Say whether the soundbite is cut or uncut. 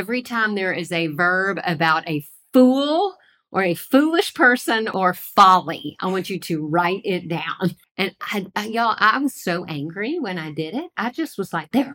cut